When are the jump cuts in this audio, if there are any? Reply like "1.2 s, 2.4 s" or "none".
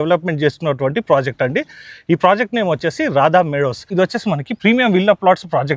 3.9 s